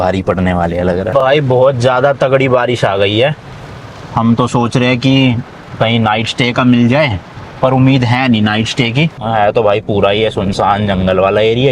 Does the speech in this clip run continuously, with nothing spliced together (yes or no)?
no